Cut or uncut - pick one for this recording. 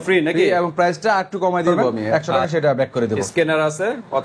cut